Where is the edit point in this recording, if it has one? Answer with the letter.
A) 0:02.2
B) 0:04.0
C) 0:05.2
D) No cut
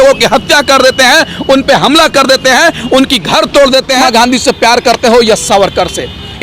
B